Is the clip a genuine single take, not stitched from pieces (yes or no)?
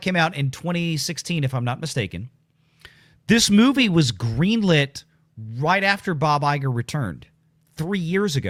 yes